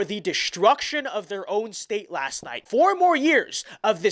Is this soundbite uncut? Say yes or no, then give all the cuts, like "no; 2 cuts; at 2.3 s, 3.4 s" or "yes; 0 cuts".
no; 1 cut; at 2.6 s